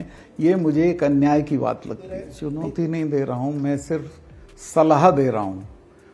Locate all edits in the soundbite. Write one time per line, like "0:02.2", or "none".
0:02.3